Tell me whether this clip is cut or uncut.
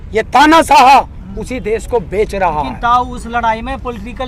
uncut